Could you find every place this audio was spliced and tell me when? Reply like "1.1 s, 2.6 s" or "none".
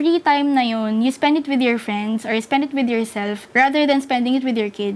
3.4 s